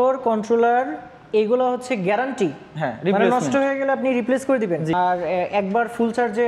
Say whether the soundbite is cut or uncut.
cut